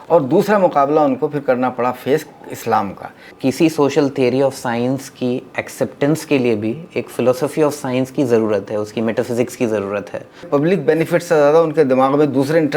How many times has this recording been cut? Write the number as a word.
two